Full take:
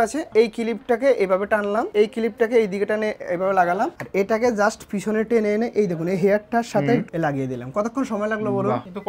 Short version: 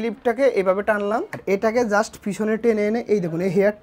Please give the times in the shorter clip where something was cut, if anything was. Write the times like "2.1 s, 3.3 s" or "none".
1.3 s